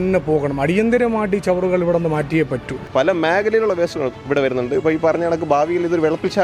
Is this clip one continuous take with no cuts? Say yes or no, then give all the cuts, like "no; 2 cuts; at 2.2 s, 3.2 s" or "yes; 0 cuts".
no; 1 cut; at 2.8 s